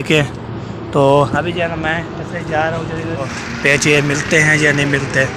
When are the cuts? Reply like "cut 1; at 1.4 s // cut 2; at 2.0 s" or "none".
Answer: cut 1; at 3.4 s